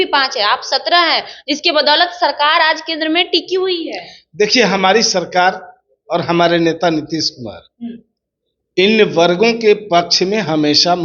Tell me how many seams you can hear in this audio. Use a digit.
0